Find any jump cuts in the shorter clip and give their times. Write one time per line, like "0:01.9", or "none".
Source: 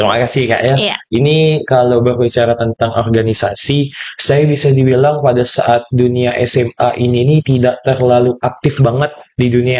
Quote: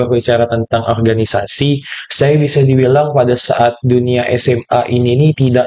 none